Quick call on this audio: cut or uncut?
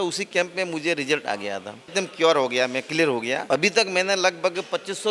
cut